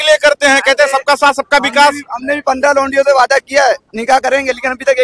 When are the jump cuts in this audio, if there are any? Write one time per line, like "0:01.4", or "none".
none